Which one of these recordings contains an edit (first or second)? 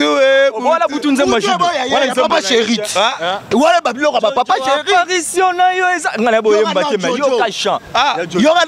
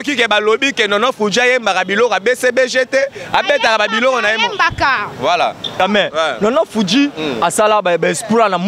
second